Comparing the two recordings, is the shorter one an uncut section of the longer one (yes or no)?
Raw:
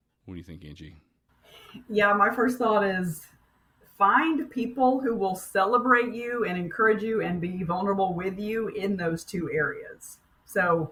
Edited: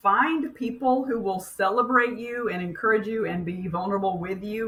yes